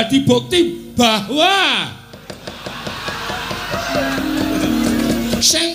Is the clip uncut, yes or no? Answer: yes